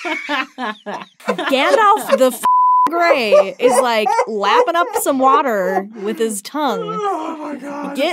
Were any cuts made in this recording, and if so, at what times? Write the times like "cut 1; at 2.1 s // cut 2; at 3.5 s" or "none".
cut 1; at 1.1 s

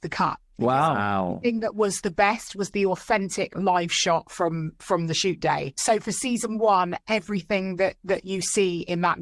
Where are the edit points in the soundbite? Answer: cut 1; at 5.7 s

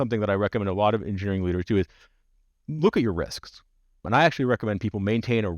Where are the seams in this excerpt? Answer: cut 1; at 4.0 s

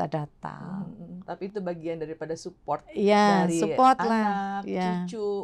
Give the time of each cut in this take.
none

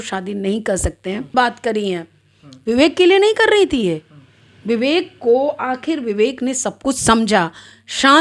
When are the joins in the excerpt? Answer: cut 1; at 1.3 s

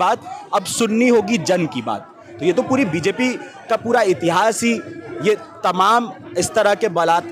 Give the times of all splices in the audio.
cut 1; at 2.2 s

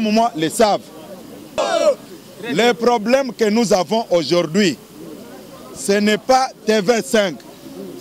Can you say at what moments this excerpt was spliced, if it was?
cut 1; at 1.6 s

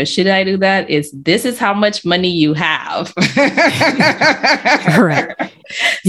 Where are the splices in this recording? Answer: none

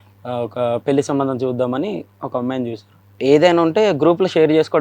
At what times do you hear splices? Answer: cut 1; at 3.0 s

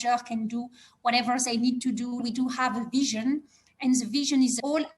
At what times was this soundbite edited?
cut 1; at 2.2 s

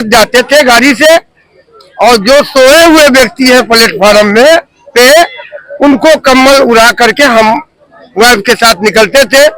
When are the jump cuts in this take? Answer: none

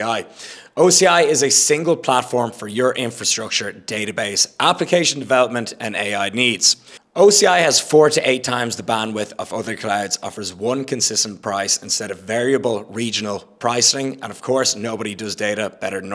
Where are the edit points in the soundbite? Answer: none

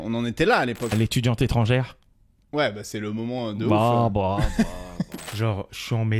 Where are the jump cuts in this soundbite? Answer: cut 1; at 0.9 s // cut 2; at 5.2 s

